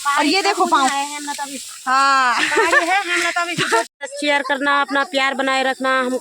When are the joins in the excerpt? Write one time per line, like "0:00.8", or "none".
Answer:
0:03.9